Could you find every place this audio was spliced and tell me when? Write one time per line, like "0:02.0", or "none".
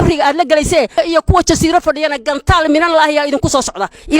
0:00.9